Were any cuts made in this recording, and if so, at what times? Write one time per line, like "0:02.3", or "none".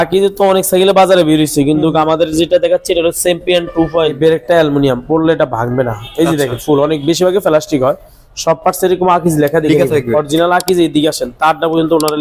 0:04.1